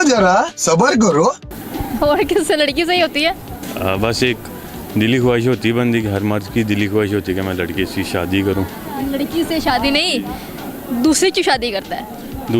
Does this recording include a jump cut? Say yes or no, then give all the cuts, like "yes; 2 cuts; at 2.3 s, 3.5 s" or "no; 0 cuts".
no; 0 cuts